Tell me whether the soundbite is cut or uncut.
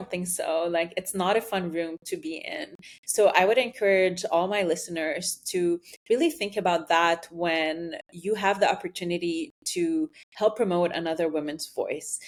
uncut